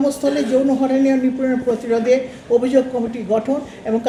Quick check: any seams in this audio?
no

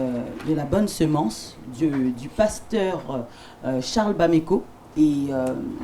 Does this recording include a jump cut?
yes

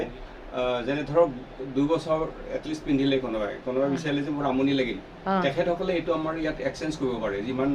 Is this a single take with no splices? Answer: yes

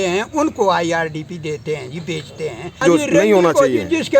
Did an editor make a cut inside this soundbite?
yes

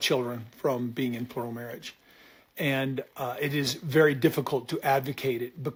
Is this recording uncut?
yes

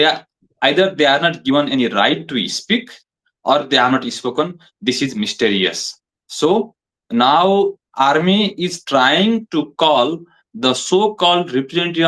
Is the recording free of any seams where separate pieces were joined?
yes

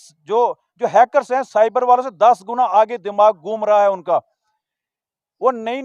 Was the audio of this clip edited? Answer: no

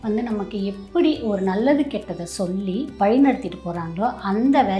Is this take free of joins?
yes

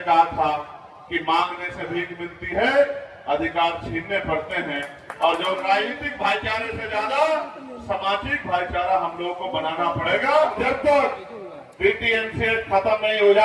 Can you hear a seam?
yes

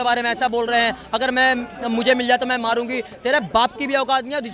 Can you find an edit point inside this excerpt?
no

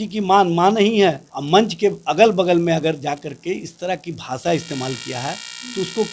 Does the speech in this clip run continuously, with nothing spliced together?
no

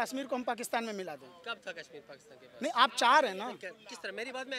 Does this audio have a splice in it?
no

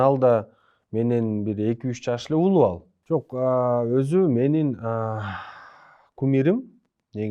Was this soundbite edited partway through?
yes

